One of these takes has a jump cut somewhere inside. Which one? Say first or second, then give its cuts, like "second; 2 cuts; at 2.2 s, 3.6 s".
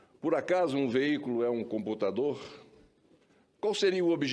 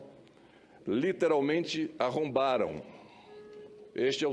second; 1 cut; at 1.7 s